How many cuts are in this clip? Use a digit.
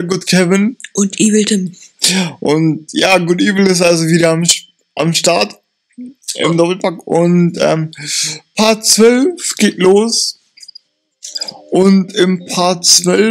1